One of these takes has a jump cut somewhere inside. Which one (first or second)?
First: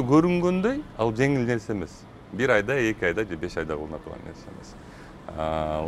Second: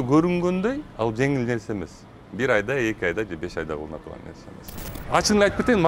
second